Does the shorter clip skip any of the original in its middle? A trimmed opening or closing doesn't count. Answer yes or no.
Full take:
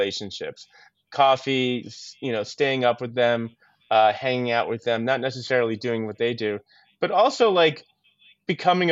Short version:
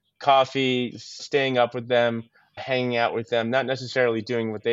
yes